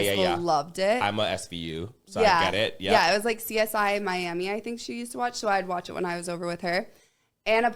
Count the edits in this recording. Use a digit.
0